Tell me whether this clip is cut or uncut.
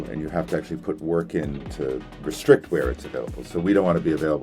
cut